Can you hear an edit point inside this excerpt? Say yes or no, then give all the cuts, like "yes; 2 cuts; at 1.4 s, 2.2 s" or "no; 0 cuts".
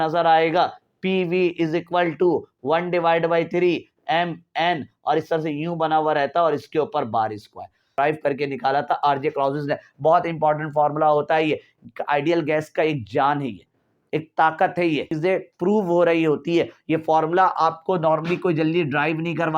yes; 2 cuts; at 7.9 s, 15.1 s